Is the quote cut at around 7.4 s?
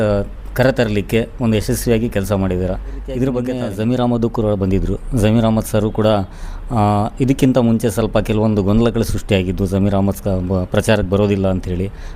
no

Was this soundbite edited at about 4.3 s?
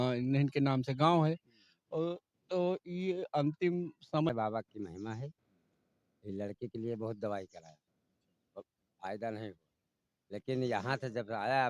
yes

